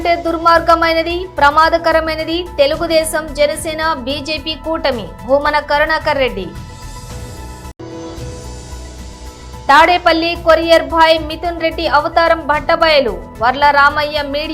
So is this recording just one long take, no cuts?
no; 3 cuts; at 6.5 s, 7.7 s, 9.6 s

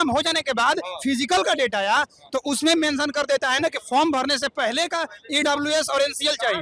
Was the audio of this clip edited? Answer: no; 0 cuts

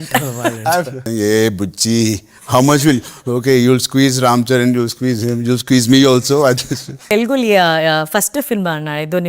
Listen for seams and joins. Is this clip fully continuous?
no; 2 cuts; at 1.0 s, 7.1 s

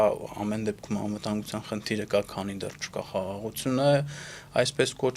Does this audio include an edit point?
no; 0 cuts

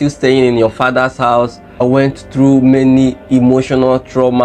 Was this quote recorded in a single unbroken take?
no; 1 cut; at 1.6 s

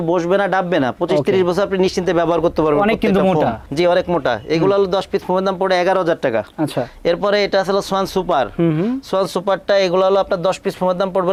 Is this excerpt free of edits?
yes; 0 cuts

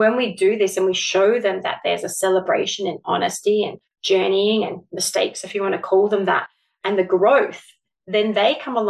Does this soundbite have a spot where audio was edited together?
no; 0 cuts

